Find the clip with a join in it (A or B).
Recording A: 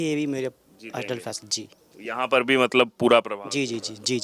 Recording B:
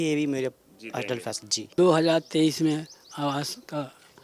B